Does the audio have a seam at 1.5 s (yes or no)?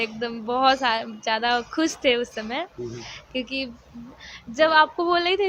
no